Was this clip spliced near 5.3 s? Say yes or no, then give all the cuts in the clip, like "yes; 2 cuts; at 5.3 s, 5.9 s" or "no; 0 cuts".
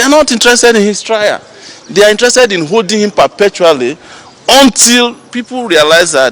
no; 0 cuts